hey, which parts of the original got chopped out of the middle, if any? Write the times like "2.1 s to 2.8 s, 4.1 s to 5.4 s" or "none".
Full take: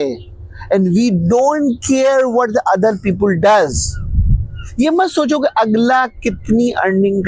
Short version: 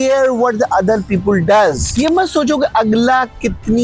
3.8 s to 4.7 s